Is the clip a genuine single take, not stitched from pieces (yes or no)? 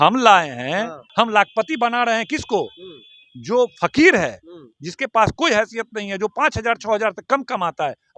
no